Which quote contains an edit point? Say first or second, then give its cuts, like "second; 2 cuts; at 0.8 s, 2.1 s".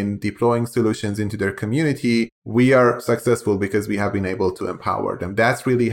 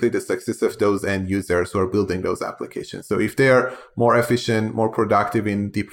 first; 1 cut; at 2.4 s